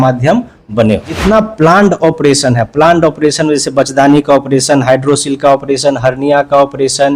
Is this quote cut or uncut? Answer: cut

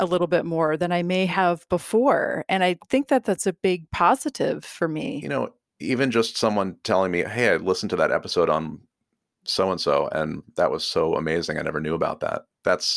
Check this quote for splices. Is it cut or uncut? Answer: cut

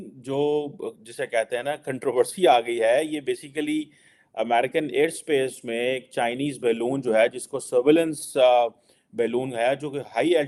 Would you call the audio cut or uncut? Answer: uncut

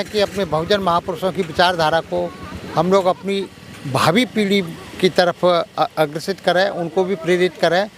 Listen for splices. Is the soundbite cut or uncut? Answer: uncut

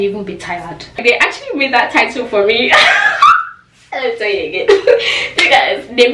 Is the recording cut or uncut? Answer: cut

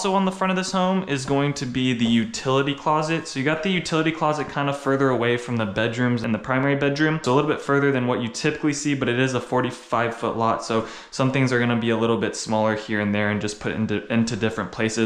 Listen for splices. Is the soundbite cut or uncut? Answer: uncut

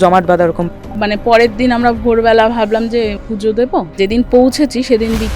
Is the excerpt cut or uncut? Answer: cut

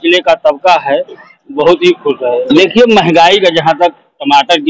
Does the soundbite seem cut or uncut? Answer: cut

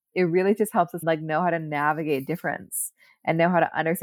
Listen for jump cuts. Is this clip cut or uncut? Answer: cut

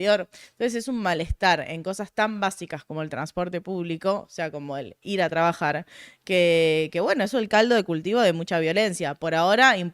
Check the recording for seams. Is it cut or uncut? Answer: uncut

